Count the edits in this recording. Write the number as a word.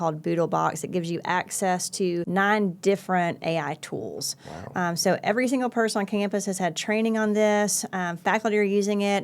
one